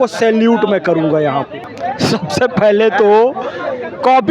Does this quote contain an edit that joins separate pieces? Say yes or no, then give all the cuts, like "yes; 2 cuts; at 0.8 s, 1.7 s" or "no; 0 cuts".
yes; 1 cut; at 1.6 s